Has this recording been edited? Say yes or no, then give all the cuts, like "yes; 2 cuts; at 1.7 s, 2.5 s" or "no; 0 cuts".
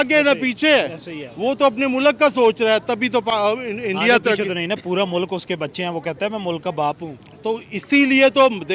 no; 0 cuts